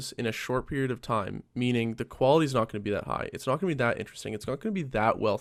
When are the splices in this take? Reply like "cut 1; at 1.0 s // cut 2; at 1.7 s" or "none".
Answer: none